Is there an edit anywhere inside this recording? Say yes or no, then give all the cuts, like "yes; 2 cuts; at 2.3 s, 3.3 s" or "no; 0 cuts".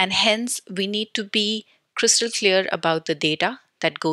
no; 0 cuts